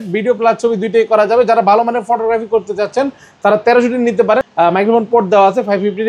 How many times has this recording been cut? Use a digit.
1